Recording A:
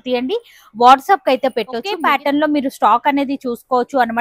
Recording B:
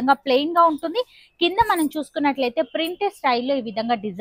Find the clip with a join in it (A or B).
A